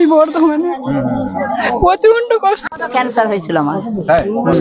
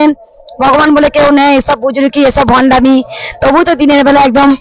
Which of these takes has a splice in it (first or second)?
first